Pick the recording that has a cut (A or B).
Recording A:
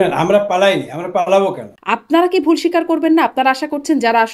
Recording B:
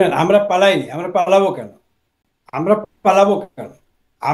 A